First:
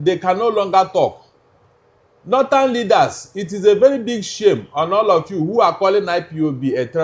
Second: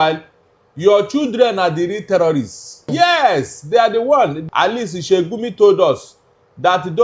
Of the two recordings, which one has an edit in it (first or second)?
second